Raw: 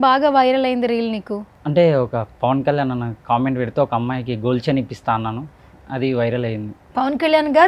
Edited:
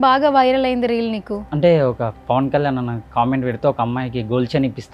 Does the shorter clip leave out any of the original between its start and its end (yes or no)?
yes